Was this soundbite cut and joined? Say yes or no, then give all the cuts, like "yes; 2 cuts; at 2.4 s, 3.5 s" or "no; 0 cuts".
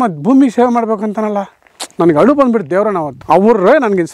yes; 1 cut; at 3.1 s